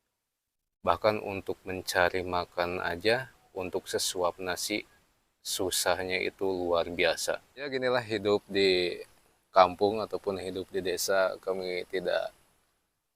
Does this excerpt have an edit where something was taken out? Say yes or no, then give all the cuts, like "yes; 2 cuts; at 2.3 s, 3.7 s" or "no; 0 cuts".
yes; 1 cut; at 7.7 s